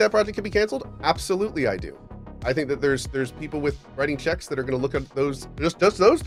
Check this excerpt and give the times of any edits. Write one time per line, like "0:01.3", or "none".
none